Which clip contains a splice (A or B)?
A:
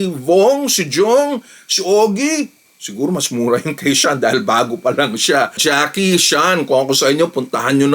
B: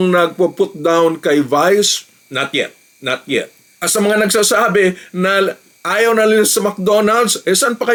A